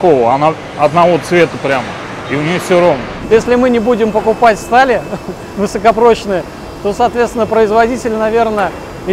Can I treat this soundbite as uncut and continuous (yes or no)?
no